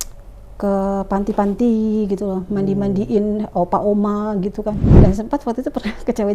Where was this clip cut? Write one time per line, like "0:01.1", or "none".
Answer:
0:04.9